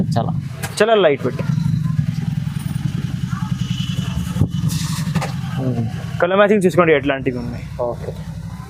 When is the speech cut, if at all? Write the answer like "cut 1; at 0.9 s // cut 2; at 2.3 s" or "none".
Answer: none

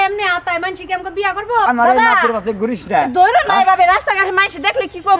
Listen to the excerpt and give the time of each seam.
cut 1; at 1.7 s

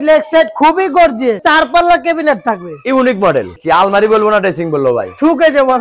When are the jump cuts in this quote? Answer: cut 1; at 1.4 s // cut 2; at 3.5 s

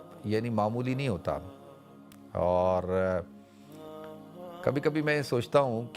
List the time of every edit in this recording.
none

